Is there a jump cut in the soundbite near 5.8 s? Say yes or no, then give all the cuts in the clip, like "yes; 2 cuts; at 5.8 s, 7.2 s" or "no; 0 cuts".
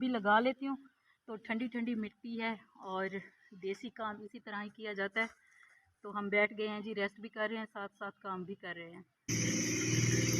no; 1 cut; at 9.3 s